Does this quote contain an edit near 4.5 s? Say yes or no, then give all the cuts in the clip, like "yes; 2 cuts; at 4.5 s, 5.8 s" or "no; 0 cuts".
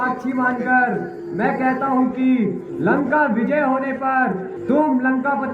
yes; 3 cuts; at 1.2 s, 2.7 s, 4.5 s